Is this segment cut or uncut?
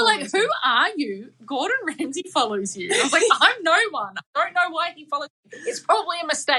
uncut